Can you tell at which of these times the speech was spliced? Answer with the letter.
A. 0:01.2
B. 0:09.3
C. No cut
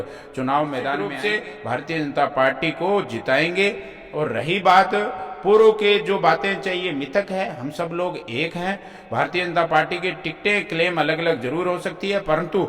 A